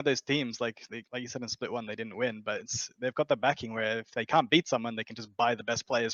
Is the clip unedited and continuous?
yes; 0 cuts

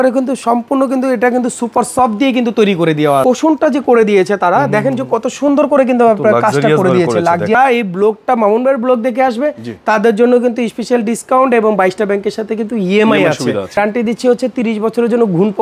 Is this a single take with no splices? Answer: no; 3 cuts; at 3.2 s, 7.5 s, 13.8 s

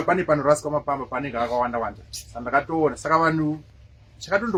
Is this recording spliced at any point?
no; 0 cuts

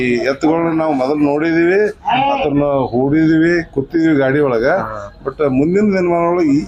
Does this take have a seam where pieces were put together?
no; 0 cuts

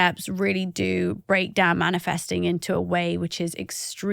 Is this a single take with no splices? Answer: yes; 0 cuts

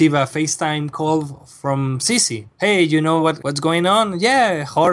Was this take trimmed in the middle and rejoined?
yes; 2 cuts; at 2.4 s, 3.5 s

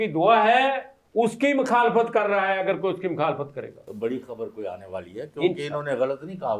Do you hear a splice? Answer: yes; 1 cut; at 3.8 s

